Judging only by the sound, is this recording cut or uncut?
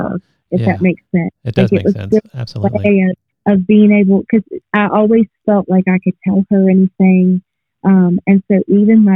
cut